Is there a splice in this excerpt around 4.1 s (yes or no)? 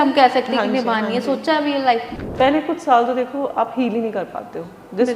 no